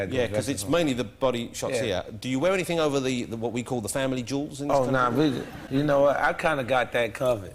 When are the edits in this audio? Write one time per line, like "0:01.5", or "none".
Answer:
0:05.5